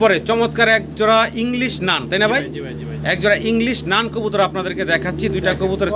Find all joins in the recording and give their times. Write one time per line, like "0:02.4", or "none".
none